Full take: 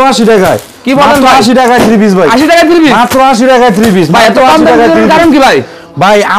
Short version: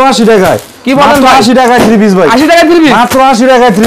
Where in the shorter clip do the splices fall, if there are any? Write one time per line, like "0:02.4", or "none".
none